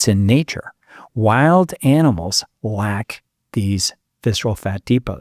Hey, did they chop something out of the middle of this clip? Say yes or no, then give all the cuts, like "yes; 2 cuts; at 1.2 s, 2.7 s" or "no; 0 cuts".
no; 0 cuts